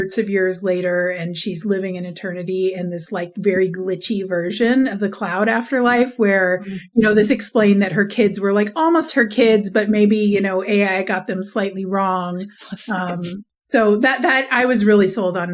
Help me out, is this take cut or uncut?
uncut